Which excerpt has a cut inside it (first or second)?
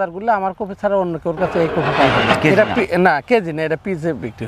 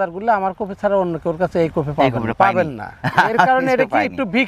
first